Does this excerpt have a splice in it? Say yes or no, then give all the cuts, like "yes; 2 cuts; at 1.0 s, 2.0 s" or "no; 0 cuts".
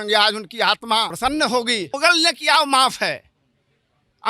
yes; 2 cuts; at 1.1 s, 1.9 s